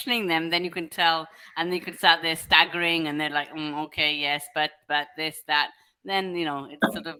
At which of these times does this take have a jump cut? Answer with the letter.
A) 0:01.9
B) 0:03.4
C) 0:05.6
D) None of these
D